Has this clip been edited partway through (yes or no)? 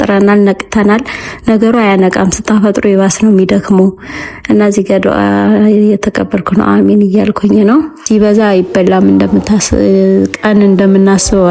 yes